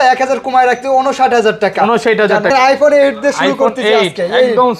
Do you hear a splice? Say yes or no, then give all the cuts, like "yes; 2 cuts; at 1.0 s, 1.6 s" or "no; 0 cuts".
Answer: yes; 1 cut; at 2.5 s